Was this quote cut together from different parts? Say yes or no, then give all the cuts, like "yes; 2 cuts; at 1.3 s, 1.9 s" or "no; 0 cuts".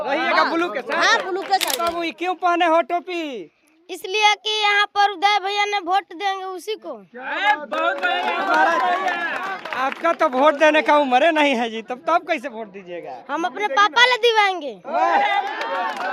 yes; 1 cut; at 1.8 s